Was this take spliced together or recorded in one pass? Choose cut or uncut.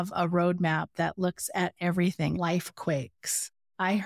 cut